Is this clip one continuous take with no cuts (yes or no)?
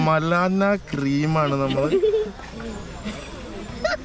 yes